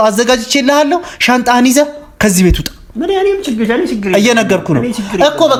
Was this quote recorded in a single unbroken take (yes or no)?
yes